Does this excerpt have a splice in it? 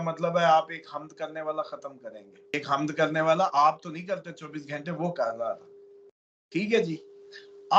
yes; 1 cut; at 2.5 s

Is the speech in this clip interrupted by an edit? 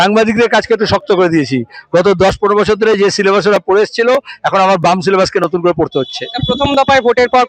no; 0 cuts

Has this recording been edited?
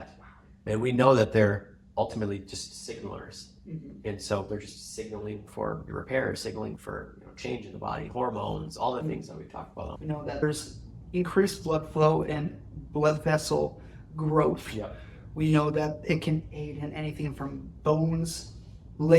yes; 1 cut; at 9.9 s

